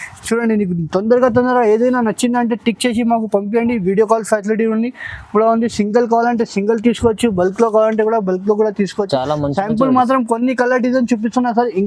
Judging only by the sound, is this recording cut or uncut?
uncut